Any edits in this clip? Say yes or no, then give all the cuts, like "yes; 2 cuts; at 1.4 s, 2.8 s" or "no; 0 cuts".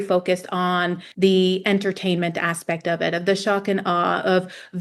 yes; 1 cut; at 1.0 s